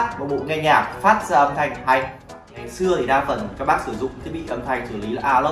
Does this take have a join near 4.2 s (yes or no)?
no